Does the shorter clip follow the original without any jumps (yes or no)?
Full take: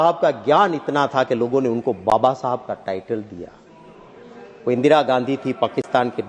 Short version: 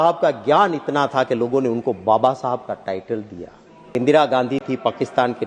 no